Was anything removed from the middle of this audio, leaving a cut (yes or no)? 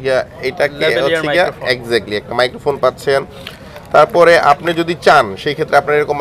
no